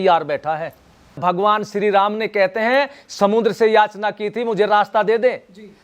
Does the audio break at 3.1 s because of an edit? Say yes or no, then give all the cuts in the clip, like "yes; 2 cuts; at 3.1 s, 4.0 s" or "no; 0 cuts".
no; 1 cut; at 1.2 s